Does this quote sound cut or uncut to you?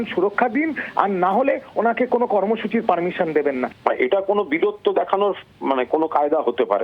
cut